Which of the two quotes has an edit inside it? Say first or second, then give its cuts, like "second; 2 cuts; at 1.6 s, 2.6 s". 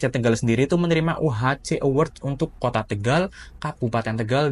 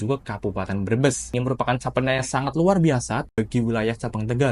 second; 2 cuts; at 1.3 s, 3.3 s